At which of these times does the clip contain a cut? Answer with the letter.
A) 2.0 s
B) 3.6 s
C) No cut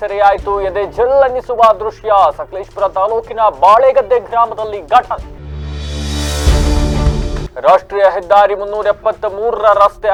C